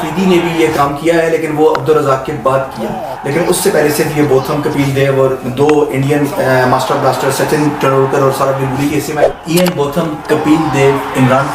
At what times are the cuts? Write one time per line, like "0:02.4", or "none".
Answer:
0:09.3